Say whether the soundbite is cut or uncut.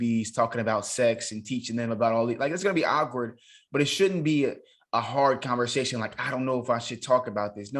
uncut